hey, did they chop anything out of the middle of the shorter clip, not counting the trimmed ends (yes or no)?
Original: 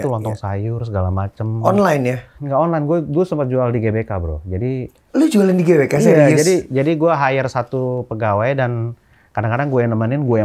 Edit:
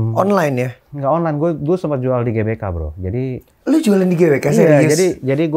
no